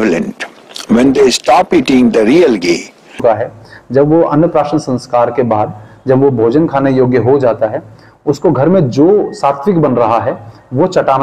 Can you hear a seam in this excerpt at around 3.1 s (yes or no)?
yes